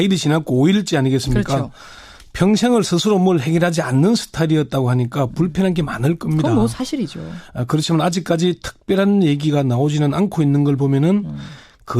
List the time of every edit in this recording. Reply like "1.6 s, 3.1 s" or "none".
10.7 s

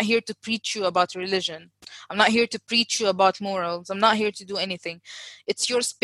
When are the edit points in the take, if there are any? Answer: none

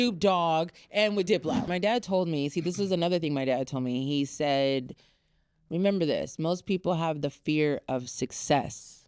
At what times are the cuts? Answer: 1.7 s

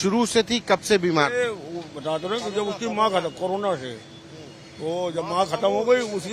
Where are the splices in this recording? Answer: none

